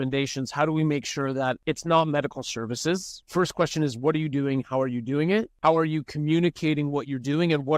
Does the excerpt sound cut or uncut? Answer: cut